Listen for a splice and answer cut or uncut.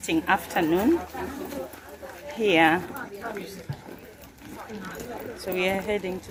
uncut